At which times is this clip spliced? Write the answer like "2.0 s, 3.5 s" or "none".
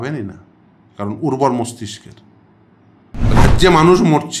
3.3 s